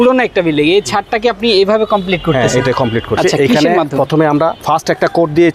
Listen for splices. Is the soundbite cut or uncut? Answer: cut